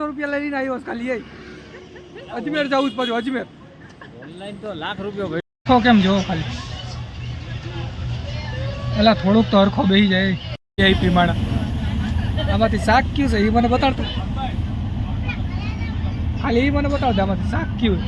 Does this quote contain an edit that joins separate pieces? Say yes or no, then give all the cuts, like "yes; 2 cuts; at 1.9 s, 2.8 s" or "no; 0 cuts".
yes; 2 cuts; at 5.4 s, 10.6 s